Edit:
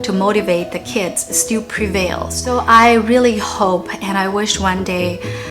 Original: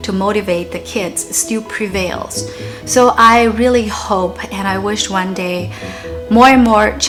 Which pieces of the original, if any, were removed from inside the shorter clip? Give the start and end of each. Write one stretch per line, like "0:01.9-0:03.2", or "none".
0:02.5-0:03.0